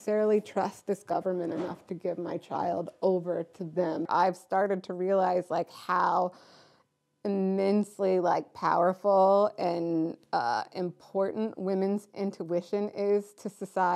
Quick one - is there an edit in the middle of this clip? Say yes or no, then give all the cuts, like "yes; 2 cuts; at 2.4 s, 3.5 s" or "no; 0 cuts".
yes; 1 cut; at 4.1 s